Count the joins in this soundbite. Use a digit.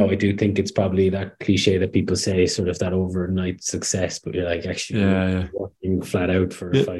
0